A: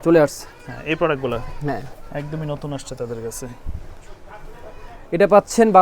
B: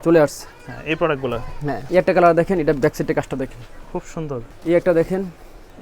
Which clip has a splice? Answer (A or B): B